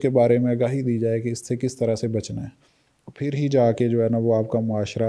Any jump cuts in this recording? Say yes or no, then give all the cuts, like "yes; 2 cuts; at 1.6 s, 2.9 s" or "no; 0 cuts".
no; 0 cuts